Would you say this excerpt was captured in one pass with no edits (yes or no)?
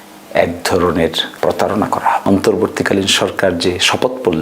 no